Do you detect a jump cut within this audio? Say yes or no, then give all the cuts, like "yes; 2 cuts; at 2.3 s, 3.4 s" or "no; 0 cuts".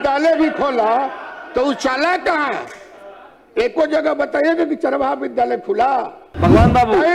yes; 1 cut; at 6.2 s